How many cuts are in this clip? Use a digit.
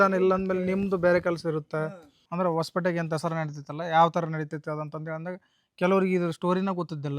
1